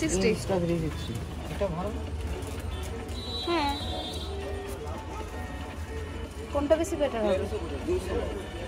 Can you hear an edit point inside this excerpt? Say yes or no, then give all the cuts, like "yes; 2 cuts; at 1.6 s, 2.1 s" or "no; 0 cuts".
no; 0 cuts